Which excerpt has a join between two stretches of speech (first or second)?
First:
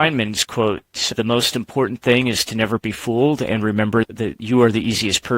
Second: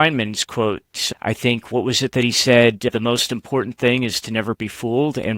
first